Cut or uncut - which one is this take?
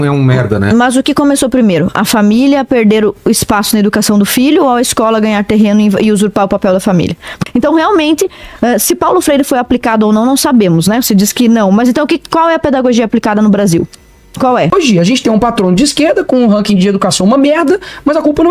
cut